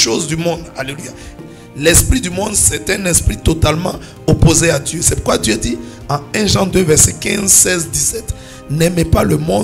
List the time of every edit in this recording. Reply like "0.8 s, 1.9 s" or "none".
1.4 s